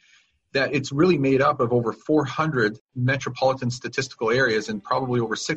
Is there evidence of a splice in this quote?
yes; 1 cut; at 2.9 s

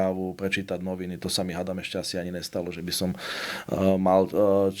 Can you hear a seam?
no; 0 cuts

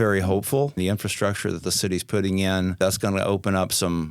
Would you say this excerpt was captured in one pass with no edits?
no; 2 cuts; at 0.8 s, 2.8 s

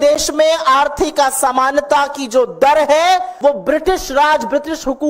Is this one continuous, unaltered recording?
no; 1 cut; at 3.3 s

